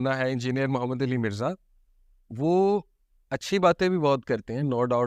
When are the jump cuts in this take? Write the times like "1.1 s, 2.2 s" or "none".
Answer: none